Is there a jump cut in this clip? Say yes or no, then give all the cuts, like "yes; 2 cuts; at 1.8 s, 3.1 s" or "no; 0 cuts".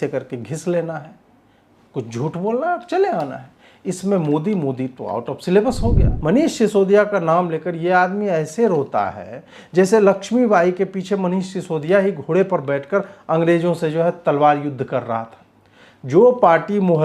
yes; 1 cut; at 6.1 s